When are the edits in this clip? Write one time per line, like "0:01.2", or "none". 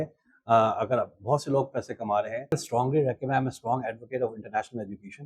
0:02.5